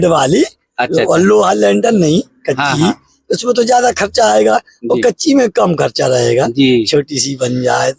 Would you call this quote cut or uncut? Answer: uncut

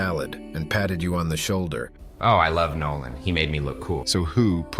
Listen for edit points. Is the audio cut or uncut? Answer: cut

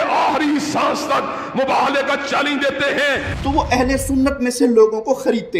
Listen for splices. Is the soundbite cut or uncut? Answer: cut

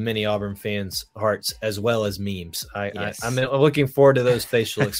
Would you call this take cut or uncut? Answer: uncut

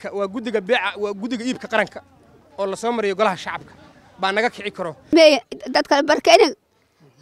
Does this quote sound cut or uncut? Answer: cut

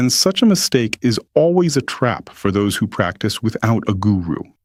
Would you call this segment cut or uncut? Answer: uncut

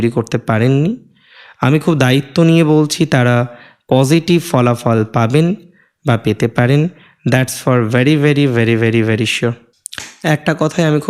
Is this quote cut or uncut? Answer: uncut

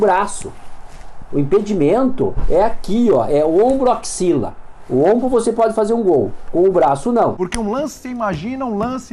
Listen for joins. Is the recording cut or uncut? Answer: cut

